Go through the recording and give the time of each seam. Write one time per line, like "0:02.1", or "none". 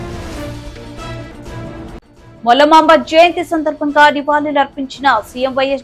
0:02.0